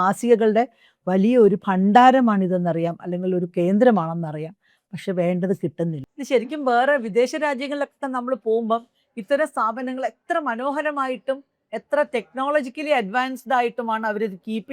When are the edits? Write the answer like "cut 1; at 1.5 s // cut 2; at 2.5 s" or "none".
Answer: cut 1; at 6.1 s